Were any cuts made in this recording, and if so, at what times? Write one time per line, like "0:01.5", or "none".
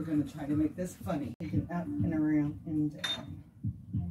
0:01.4